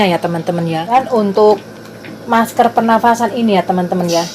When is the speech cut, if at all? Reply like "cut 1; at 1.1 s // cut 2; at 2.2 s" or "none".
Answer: cut 1; at 0.9 s